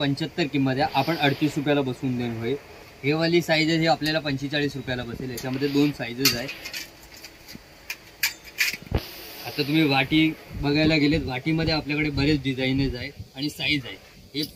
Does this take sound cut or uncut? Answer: uncut